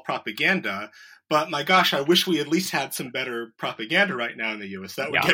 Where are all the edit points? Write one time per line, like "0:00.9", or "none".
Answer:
none

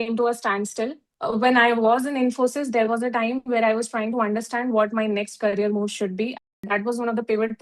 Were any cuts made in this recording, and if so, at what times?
0:01.1
0:06.4

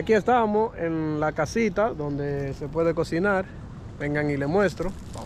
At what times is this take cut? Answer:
none

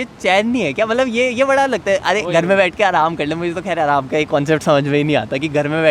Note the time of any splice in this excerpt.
none

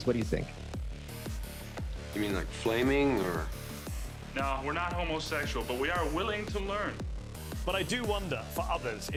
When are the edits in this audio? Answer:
none

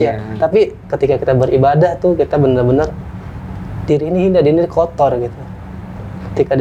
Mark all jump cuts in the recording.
none

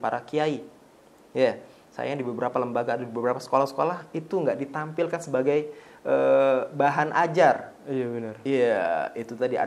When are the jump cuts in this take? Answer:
none

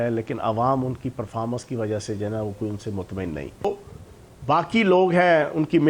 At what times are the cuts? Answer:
0:03.7

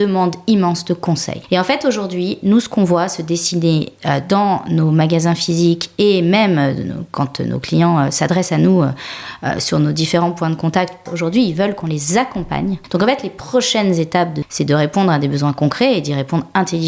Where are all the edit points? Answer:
0:01.3
0:11.1
0:12.8
0:14.4

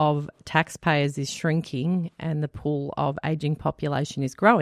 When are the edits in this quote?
none

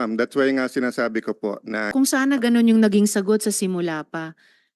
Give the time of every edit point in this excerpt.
0:01.9

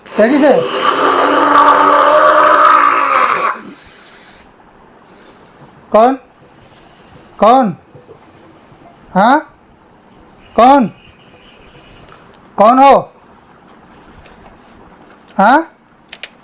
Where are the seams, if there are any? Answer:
none

